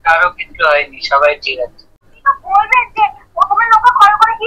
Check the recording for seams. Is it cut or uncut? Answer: cut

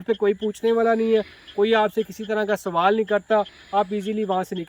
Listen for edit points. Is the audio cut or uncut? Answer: uncut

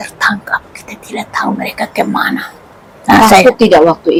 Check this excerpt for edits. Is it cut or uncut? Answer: uncut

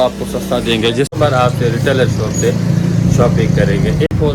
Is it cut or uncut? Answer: cut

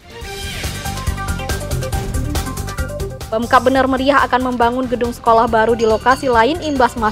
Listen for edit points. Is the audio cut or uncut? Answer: cut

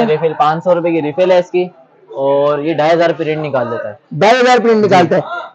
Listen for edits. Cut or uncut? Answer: uncut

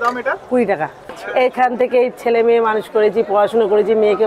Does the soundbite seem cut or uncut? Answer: cut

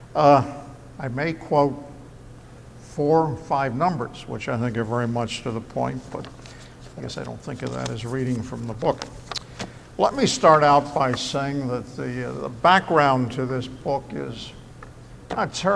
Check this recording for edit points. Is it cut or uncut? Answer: uncut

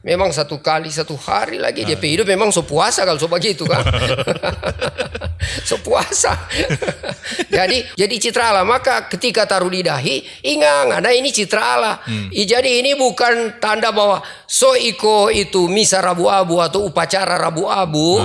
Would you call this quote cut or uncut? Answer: cut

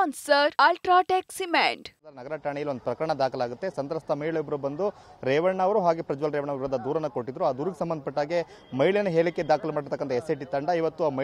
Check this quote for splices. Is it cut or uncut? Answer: cut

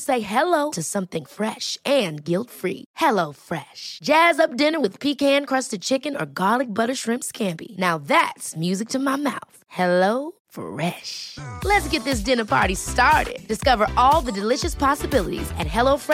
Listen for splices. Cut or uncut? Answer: uncut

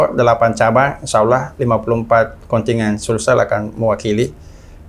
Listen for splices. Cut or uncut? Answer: uncut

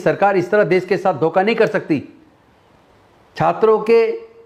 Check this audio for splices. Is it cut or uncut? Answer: uncut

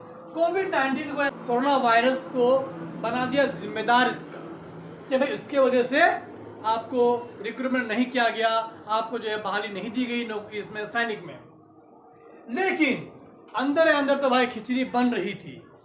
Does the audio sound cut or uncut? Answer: cut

